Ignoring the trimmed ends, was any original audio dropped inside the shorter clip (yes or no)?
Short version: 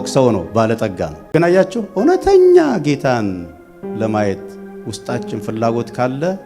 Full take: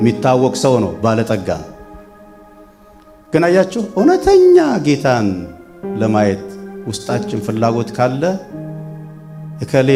yes